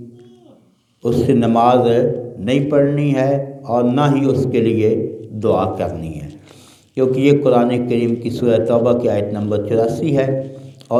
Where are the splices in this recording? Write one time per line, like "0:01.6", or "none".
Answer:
none